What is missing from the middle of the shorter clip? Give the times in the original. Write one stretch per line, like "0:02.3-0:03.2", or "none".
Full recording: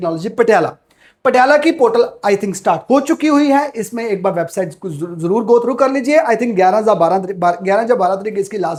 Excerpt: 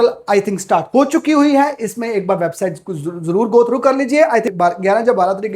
0:06.5-0:07.3